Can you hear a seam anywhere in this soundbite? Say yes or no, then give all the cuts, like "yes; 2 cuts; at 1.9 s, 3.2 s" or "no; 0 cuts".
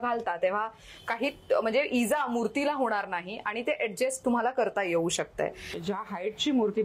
yes; 1 cut; at 5.7 s